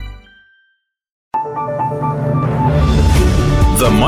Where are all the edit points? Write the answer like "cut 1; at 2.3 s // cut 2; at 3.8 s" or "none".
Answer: cut 1; at 1.2 s